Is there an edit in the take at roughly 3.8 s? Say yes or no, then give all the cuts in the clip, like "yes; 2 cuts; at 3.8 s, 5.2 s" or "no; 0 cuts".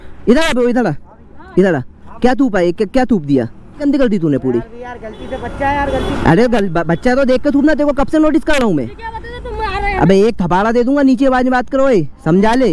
yes; 2 cuts; at 3.8 s, 10.1 s